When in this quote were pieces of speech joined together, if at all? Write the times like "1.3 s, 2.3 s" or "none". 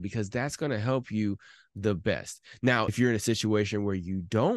2.9 s